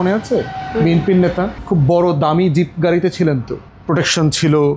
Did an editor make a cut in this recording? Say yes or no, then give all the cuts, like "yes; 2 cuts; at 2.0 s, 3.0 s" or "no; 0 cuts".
no; 0 cuts